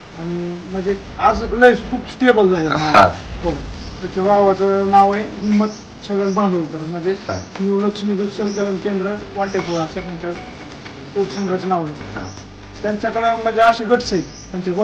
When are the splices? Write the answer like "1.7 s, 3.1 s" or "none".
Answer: none

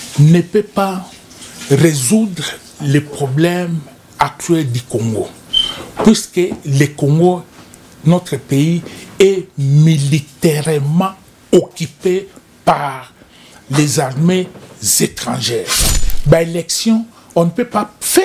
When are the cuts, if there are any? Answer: 16.1 s

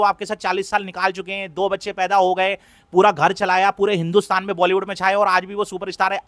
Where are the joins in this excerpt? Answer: none

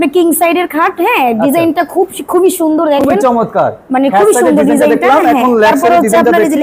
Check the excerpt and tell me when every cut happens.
none

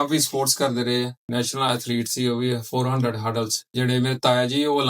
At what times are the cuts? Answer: 1.2 s, 3.6 s

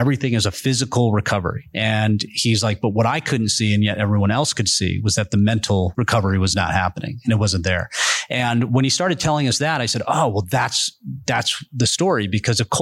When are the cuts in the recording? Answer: 1.6 s, 5.9 s

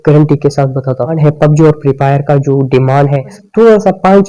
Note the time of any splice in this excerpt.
1.1 s, 3.4 s

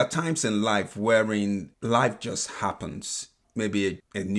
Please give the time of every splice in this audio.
1.7 s

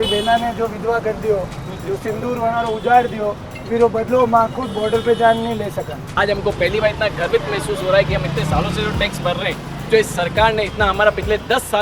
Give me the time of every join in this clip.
6.1 s

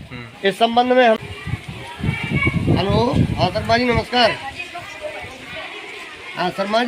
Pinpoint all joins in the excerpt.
1.2 s

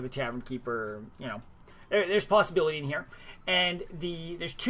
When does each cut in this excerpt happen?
none

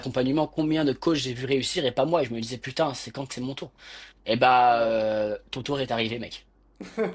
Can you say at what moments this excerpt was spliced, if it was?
none

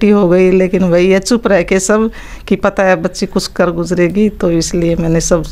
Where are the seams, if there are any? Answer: none

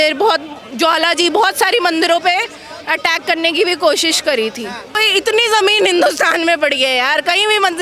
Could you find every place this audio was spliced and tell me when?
5.0 s

